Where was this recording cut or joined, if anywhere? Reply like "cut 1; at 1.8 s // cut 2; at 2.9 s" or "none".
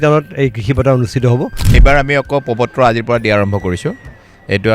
cut 1; at 1.8 s